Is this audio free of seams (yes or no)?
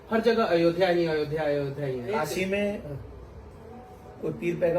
no